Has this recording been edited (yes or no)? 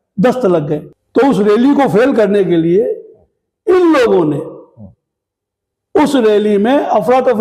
yes